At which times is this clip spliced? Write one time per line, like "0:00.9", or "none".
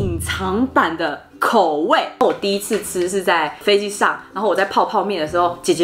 0:02.2